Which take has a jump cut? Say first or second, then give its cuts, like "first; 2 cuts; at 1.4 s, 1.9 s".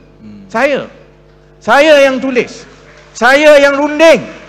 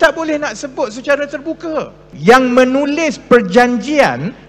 second; 1 cut; at 2.0 s